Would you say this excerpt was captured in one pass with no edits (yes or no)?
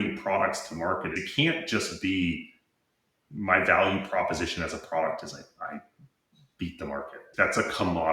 no